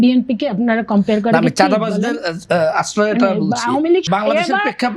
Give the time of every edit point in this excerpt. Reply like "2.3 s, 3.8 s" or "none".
4.0 s